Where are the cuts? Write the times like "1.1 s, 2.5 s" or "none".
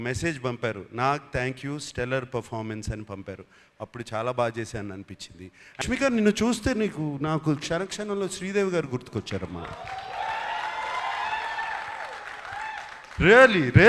5.8 s